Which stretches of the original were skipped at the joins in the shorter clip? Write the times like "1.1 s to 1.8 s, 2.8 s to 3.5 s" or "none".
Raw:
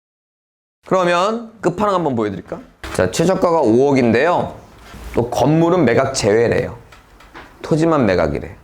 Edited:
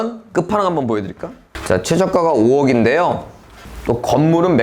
none